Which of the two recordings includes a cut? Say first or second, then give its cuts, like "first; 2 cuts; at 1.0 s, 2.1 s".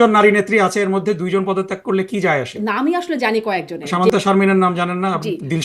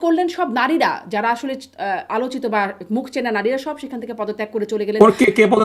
first; 2 cuts; at 2.5 s, 3.9 s